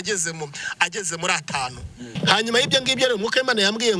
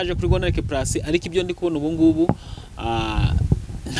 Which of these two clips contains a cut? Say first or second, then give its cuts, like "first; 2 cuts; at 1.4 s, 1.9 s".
first; 1 cut; at 2.2 s